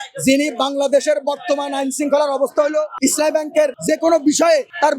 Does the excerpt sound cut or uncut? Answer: cut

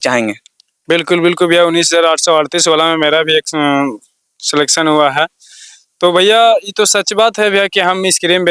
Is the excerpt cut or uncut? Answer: uncut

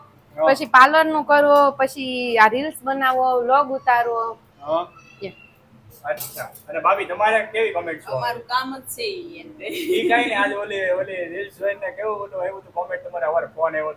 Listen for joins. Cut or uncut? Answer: uncut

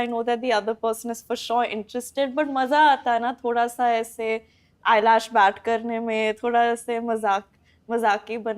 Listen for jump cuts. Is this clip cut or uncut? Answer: uncut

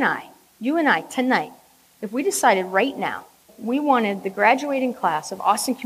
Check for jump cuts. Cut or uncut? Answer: cut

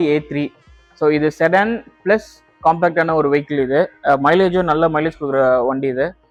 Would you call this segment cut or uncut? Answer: uncut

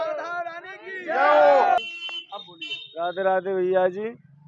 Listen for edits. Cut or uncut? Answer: cut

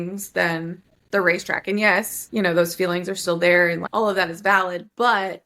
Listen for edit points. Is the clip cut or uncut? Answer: cut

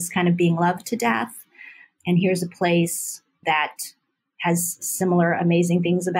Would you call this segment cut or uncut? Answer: cut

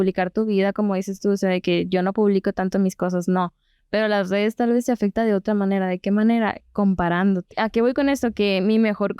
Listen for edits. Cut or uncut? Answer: cut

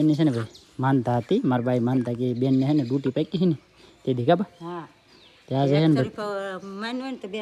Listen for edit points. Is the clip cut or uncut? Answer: uncut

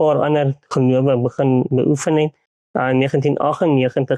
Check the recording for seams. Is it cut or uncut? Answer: cut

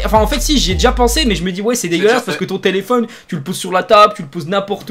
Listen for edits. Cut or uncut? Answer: uncut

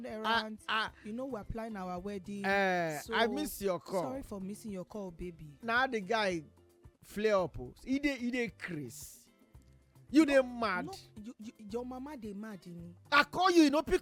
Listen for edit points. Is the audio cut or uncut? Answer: uncut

